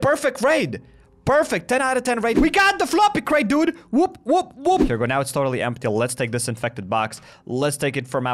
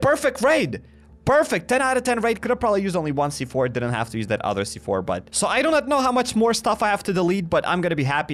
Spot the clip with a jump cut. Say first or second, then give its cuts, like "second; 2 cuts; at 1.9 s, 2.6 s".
first; 2 cuts; at 2.4 s, 4.8 s